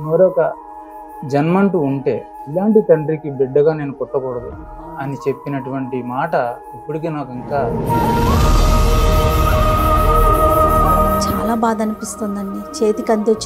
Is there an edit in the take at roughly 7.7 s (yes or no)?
yes